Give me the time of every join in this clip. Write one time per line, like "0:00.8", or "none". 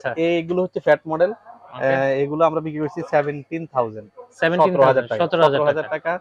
none